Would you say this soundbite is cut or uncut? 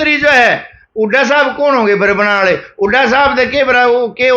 uncut